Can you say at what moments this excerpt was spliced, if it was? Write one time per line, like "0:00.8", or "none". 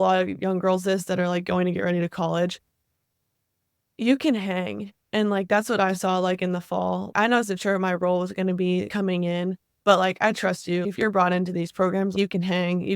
0:02.8
0:07.1
0:08.9
0:10.8
0:12.1